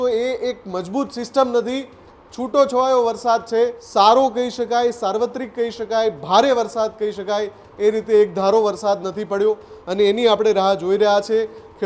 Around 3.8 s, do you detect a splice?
yes; 1 cut; at 3.8 s

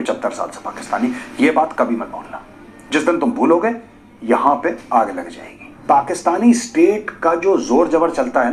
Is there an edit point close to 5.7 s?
yes; 1 cut; at 5.7 s

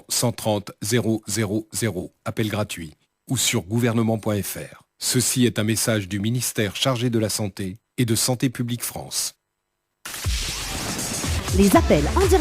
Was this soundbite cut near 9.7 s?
yes; 1 cut; at 9.7 s

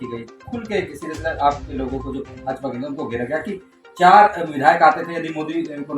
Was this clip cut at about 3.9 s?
no; 0 cuts

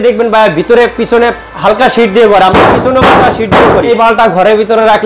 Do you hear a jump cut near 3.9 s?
yes; 1 cut; at 3.9 s

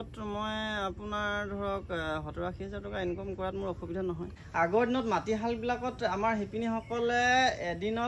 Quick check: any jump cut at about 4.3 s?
yes; 1 cut; at 4.3 s

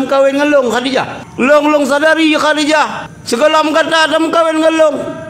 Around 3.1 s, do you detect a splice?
yes; 2 cuts; at 1.2 s, 3.1 s

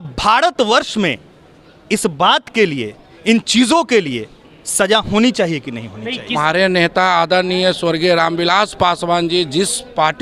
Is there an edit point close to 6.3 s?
yes; 1 cut; at 6.3 s

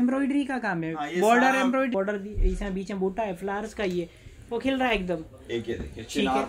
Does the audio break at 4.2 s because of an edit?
no; 1 cut; at 1.9 s

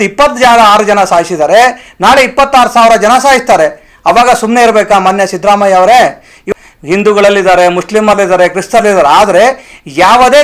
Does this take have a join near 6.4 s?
yes; 1 cut; at 6.4 s

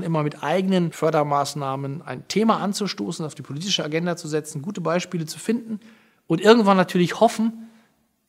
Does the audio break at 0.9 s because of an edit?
yes; 1 cut; at 0.9 s

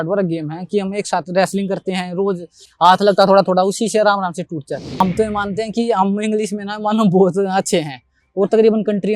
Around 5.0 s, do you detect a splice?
yes; 1 cut; at 5.0 s

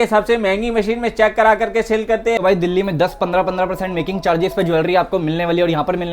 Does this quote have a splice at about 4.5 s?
no; 1 cut; at 2.4 s

